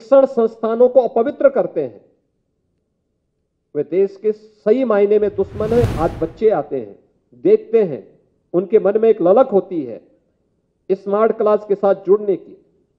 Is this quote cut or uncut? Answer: cut